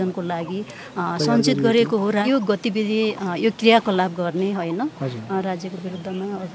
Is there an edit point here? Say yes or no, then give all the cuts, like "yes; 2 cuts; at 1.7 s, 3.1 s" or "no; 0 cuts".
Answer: yes; 1 cut; at 2.2 s